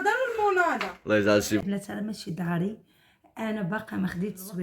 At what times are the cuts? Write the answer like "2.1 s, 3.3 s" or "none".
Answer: 1.6 s